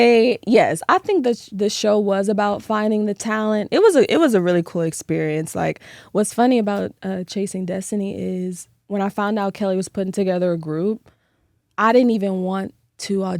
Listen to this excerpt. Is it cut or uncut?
uncut